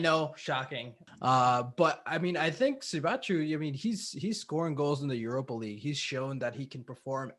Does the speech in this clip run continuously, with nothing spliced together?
no; 1 cut; at 1.0 s

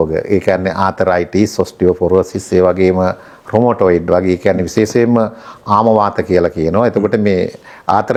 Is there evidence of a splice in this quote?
no; 0 cuts

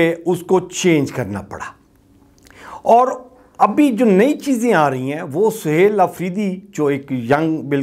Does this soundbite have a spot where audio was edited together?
no; 0 cuts

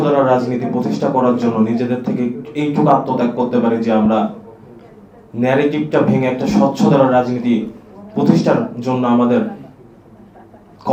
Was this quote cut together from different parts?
no; 0 cuts

